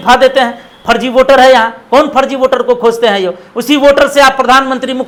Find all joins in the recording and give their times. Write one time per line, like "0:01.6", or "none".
none

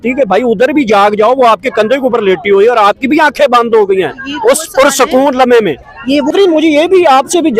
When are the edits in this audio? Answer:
0:06.3

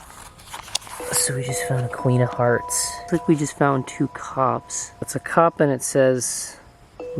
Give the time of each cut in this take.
0:03.0
0:05.1

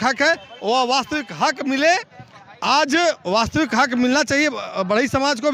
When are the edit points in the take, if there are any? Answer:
none

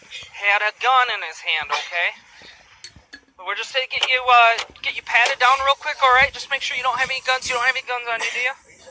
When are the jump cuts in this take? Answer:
none

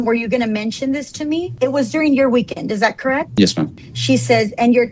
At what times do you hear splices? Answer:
0:03.9

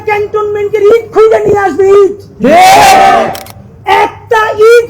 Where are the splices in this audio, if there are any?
none

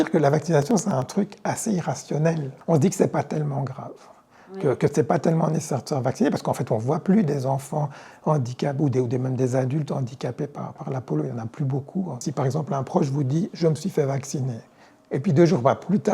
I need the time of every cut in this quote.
0:02.5
0:12.3

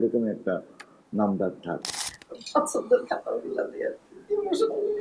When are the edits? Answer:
0:02.0

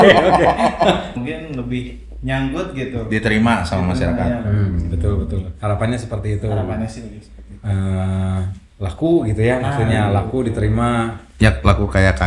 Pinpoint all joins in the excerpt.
0:01.1

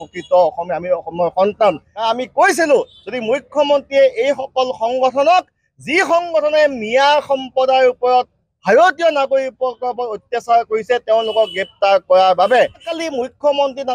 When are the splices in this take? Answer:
0:01.9
0:12.9

